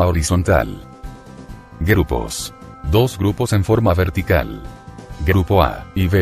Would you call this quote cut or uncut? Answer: uncut